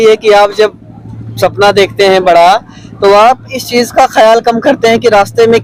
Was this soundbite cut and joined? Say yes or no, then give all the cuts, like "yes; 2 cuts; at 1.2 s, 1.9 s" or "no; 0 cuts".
no; 0 cuts